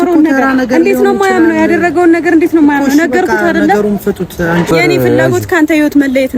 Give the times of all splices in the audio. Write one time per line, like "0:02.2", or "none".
0:04.7